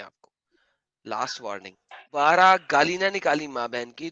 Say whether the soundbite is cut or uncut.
cut